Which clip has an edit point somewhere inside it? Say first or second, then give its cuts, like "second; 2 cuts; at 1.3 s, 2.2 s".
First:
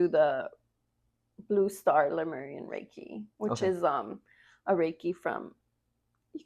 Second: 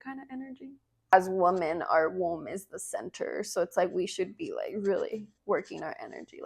second; 1 cut; at 1.1 s